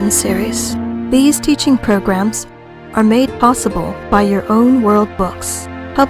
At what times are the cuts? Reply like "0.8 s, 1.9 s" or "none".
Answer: 5.1 s